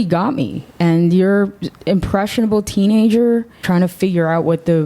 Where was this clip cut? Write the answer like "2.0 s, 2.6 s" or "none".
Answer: 3.6 s